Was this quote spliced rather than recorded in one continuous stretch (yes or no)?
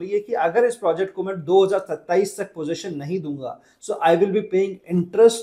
no